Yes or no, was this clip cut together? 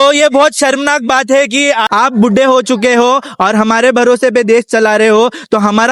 yes